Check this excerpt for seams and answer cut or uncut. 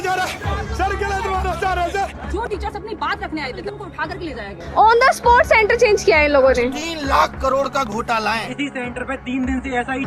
uncut